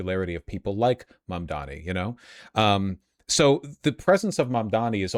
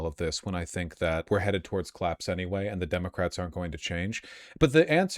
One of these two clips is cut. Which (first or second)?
second